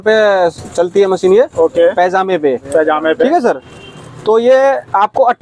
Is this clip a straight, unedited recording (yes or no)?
yes